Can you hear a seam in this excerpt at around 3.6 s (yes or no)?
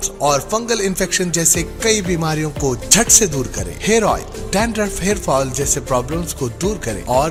no